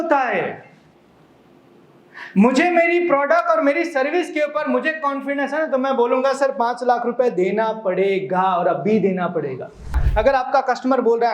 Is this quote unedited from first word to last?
no; 1 cut; at 10.0 s

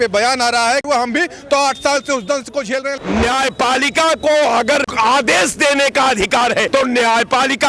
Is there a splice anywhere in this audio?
yes; 4 cuts; at 0.8 s, 2.9 s, 4.9 s, 6.7 s

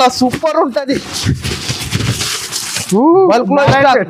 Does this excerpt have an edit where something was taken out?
no; 0 cuts

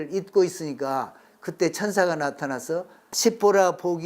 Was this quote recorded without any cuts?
no; 1 cut; at 3.0 s

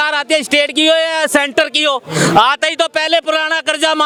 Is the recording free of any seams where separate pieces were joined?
yes; 0 cuts

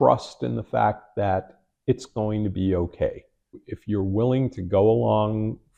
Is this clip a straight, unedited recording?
no; 1 cut; at 3.5 s

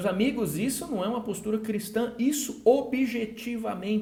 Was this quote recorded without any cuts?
yes; 0 cuts

